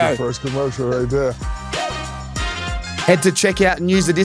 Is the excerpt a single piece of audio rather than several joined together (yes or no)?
no